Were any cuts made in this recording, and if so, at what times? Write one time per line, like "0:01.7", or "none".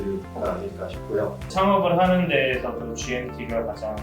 0:01.5